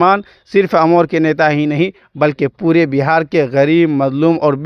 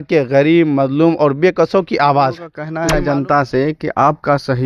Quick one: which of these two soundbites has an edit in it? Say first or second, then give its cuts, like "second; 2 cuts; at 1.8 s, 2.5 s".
second; 1 cut; at 2.6 s